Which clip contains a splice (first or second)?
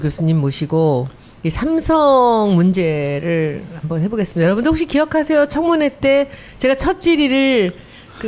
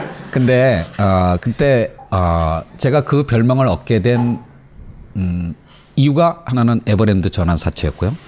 first